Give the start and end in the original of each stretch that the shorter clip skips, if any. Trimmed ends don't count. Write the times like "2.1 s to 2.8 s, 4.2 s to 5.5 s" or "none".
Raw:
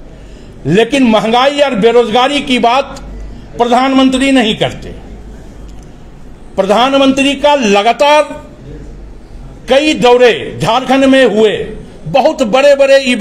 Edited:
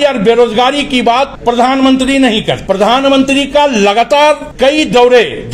2.9 s to 3.5 s, 4.7 s to 6.5 s, 8.4 s to 9.6 s